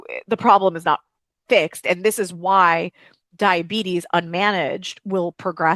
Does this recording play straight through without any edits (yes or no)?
yes